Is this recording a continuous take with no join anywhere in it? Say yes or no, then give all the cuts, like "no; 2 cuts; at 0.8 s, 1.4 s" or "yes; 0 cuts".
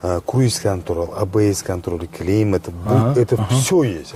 yes; 0 cuts